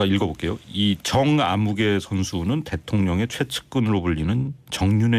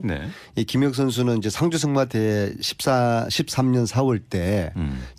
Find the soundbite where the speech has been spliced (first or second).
first